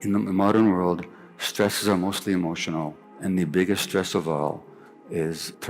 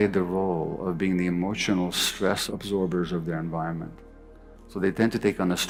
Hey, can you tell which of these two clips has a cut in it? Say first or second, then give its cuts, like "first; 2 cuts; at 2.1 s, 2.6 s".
first; 1 cut; at 3.0 s